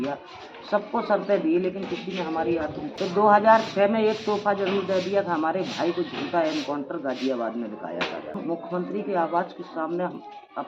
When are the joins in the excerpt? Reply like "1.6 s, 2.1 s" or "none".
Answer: 2.9 s, 8.4 s

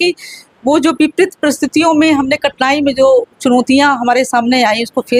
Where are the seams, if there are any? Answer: none

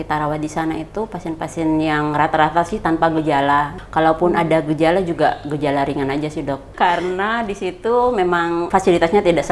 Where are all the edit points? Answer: 3.8 s, 6.7 s, 8.7 s

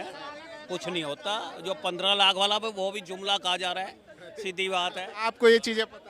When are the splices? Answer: 5.1 s

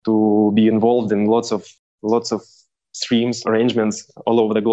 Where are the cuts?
3.4 s

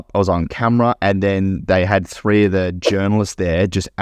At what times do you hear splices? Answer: none

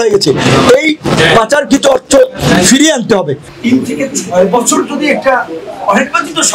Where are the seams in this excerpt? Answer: 3.4 s

